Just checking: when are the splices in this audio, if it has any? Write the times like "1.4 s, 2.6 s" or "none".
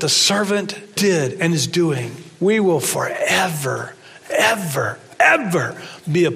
0.9 s, 2.2 s

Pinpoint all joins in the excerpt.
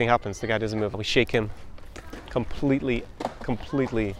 0.9 s

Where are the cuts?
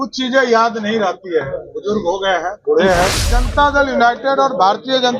3.4 s

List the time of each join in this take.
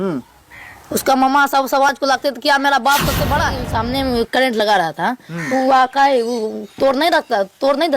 3.7 s

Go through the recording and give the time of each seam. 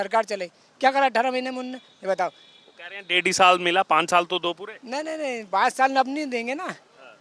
none

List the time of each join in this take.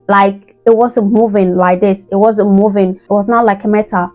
3.0 s

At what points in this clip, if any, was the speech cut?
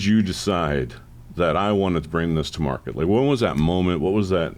none

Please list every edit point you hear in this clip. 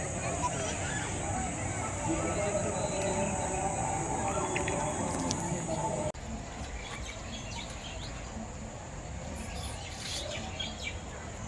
6.2 s

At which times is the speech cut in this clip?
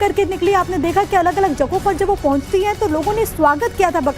2.5 s

